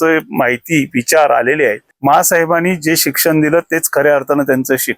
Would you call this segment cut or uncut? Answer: cut